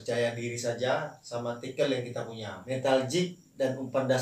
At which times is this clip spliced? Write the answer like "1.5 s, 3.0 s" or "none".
2.6 s